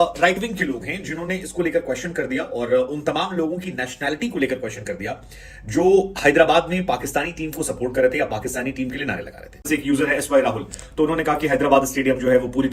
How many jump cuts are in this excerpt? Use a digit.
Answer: 1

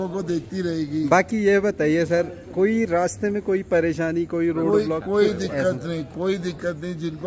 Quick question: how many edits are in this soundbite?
0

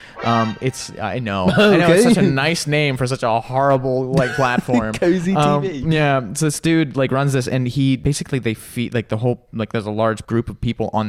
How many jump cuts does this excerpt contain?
2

